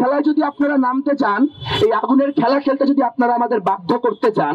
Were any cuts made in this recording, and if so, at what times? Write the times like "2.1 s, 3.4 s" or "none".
none